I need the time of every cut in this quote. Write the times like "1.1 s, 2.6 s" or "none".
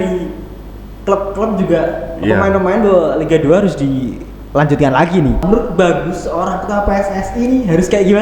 5.4 s